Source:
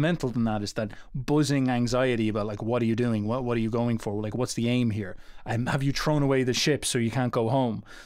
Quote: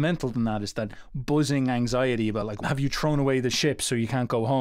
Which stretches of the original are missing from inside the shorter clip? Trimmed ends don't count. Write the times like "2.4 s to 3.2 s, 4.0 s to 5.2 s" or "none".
2.5 s to 5.6 s